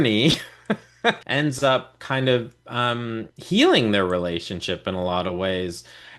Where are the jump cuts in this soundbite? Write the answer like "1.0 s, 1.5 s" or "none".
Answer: 1.2 s